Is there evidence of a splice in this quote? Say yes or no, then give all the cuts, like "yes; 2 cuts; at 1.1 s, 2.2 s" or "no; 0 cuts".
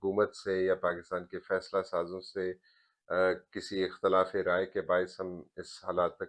no; 0 cuts